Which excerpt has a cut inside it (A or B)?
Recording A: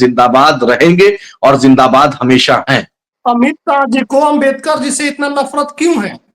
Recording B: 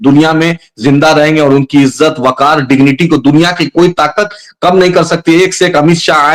A